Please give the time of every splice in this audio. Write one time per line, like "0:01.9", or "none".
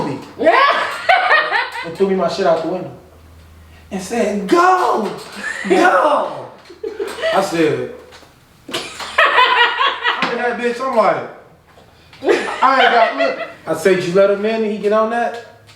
0:01.5
0:10.4
0:13.5